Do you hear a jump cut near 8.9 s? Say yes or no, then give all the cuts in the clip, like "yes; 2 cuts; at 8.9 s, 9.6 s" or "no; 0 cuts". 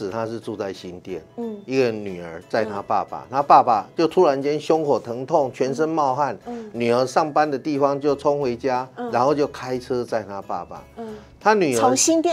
no; 0 cuts